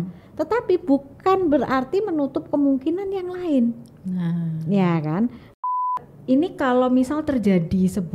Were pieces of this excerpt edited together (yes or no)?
yes